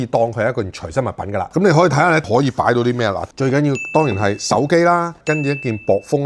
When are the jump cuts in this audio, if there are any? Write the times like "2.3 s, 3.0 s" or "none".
none